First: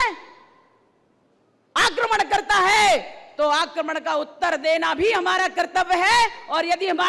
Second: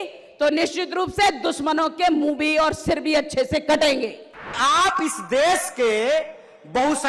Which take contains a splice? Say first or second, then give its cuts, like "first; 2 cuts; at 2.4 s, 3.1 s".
second; 1 cut; at 4.6 s